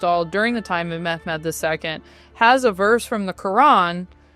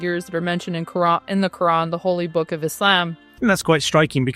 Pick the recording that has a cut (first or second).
second